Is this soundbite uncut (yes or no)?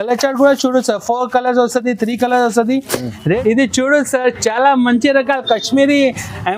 no